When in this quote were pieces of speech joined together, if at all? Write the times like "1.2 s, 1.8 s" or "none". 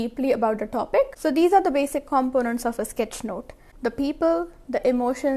1.1 s